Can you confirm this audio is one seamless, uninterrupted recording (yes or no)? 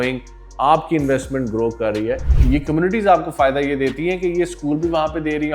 no